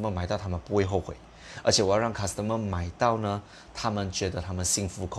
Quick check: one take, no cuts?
yes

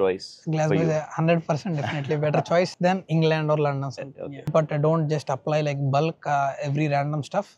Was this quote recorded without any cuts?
no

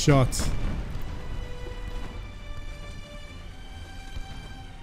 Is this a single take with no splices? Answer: yes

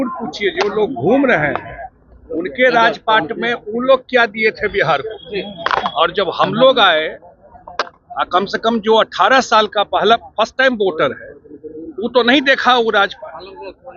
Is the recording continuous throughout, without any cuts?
yes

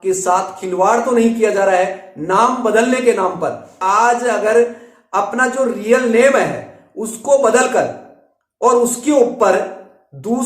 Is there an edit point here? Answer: yes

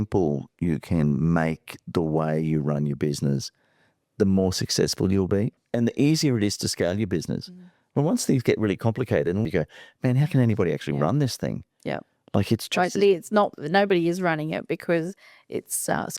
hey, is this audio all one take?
no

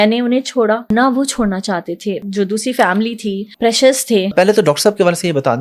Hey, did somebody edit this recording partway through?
yes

